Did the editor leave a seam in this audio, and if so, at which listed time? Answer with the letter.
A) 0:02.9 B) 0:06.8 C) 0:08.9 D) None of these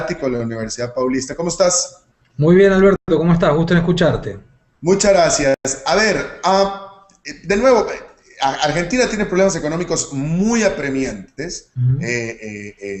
A